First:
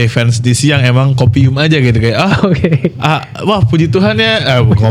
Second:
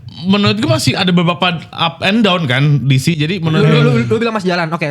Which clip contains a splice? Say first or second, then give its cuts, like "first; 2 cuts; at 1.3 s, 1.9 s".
second; 2 cuts; at 1.0 s, 3.7 s